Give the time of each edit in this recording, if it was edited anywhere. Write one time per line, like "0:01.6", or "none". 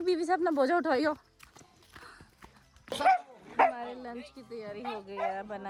none